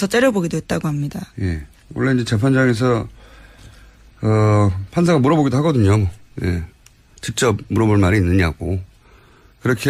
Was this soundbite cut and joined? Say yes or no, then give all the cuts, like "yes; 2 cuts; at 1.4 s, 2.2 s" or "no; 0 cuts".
no; 0 cuts